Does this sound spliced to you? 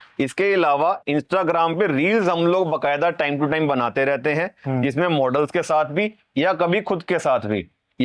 no; 0 cuts

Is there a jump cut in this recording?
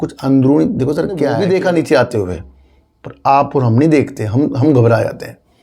yes; 1 cut; at 1.3 s

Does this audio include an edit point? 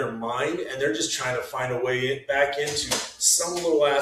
no; 0 cuts

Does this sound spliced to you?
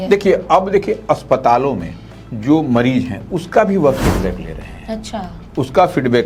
no; 0 cuts

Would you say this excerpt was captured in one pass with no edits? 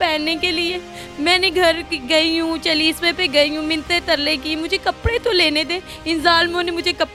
yes; 0 cuts

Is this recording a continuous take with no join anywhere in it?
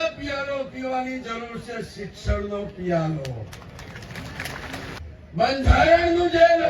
no; 1 cut; at 5.0 s

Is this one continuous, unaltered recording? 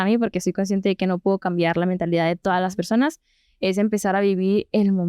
yes; 0 cuts

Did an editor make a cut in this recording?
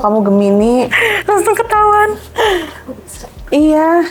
no; 0 cuts

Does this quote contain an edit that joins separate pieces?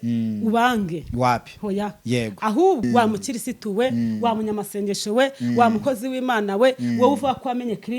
yes; 1 cut; at 2.8 s

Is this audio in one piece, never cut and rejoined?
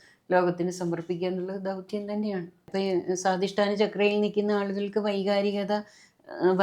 no; 1 cut; at 2.7 s

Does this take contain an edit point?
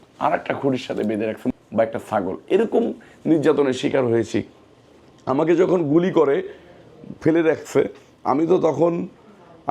no; 0 cuts

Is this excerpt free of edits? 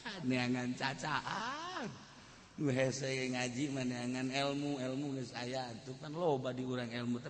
yes; 0 cuts

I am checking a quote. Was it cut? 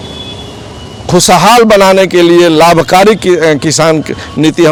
no; 0 cuts

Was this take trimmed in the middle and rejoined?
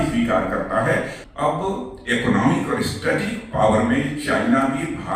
yes; 1 cut; at 1.2 s

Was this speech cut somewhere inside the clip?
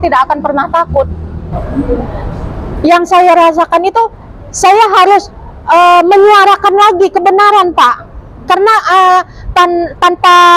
no; 0 cuts

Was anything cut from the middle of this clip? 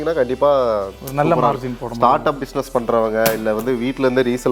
no; 0 cuts

